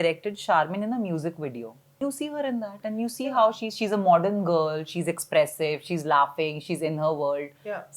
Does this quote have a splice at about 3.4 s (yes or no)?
no